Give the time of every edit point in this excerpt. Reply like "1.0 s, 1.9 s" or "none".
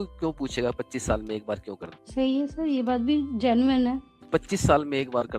4.1 s

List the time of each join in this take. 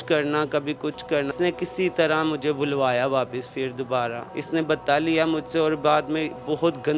1.3 s, 4.3 s

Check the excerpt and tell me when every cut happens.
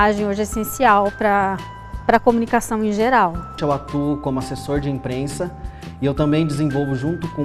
3.6 s

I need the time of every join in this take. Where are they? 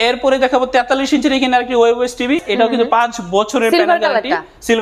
2.4 s

